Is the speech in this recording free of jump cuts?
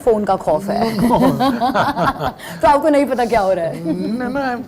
yes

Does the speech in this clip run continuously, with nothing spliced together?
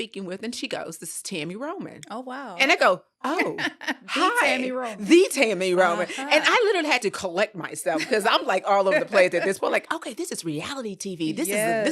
yes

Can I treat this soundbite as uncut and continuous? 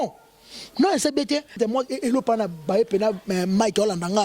no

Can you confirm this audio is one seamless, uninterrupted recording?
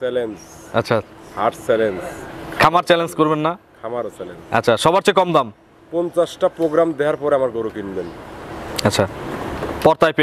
yes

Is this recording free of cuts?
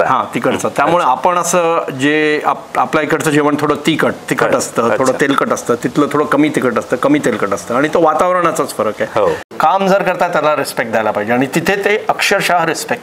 no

